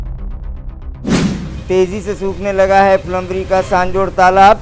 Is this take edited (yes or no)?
yes